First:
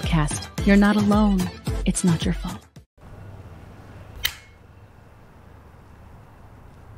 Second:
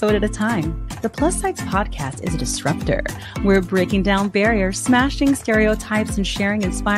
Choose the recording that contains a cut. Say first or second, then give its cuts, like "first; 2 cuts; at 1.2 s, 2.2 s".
first; 1 cut; at 2.8 s